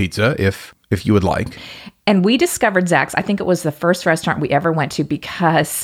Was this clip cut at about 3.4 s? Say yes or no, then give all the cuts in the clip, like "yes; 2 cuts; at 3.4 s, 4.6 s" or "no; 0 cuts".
no; 1 cut; at 1.6 s